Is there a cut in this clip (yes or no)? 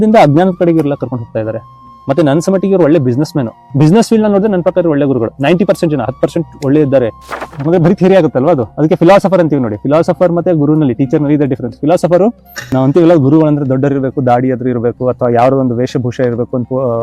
yes